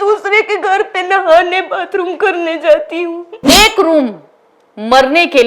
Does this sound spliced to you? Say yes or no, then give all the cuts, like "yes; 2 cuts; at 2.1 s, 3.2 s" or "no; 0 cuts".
yes; 1 cut; at 3.4 s